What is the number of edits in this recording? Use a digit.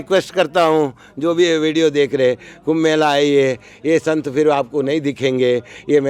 0